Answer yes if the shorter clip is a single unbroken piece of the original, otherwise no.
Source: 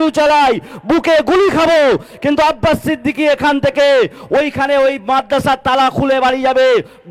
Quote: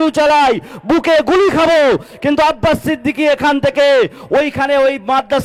yes